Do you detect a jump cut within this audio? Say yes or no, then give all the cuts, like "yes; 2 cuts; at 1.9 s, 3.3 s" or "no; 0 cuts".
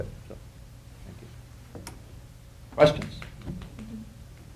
no; 0 cuts